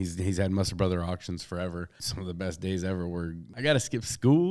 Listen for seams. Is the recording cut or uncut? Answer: cut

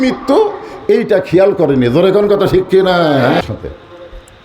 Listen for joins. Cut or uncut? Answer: cut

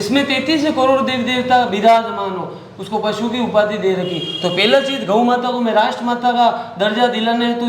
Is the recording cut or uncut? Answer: uncut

